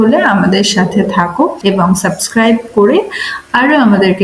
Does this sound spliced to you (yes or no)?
yes